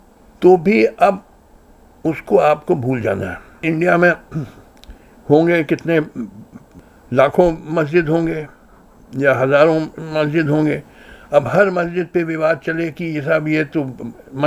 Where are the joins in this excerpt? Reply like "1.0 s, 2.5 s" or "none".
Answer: 3.5 s